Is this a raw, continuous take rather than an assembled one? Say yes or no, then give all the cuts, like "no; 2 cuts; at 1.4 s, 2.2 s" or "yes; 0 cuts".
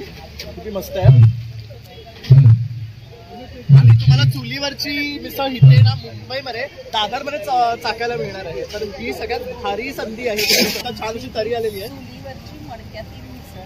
no; 1 cut; at 10.8 s